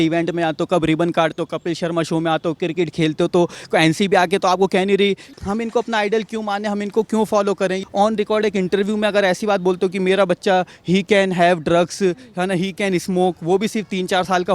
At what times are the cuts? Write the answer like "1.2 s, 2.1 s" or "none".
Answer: 5.3 s, 7.8 s